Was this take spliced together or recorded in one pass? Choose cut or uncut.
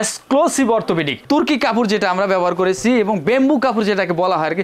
cut